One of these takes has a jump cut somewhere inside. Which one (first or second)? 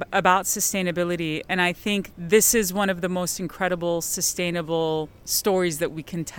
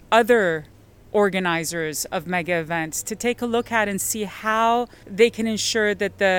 first